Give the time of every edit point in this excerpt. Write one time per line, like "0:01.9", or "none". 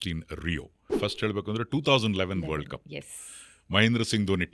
0:00.9